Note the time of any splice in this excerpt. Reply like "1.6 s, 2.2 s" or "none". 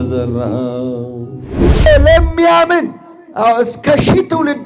1.9 s

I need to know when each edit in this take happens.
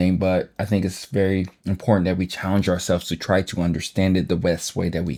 none

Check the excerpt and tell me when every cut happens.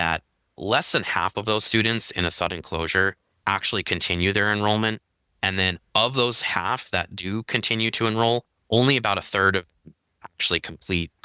none

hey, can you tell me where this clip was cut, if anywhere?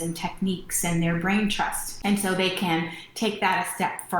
1.9 s

